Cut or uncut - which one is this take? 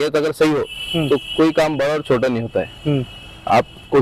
uncut